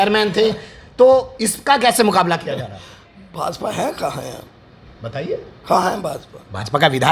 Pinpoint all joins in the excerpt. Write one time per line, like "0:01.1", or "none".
none